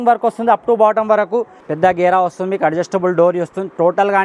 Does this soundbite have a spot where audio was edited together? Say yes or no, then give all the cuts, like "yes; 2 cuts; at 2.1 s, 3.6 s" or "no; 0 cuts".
yes; 1 cut; at 1.6 s